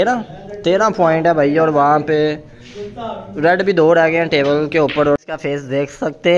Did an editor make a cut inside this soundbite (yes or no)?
yes